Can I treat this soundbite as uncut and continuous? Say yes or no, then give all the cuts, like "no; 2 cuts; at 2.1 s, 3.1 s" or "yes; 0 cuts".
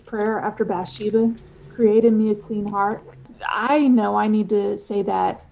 no; 1 cut; at 3.3 s